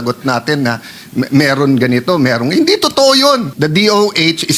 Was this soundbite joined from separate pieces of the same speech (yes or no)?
yes